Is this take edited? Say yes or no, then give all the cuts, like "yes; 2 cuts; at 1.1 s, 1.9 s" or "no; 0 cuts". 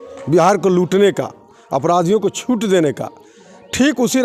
no; 0 cuts